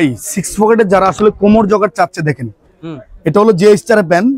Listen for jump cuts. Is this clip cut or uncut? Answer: uncut